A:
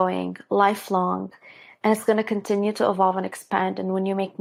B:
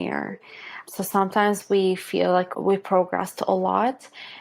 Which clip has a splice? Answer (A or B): B